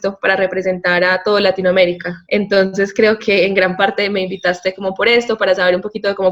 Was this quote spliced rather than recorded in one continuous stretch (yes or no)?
yes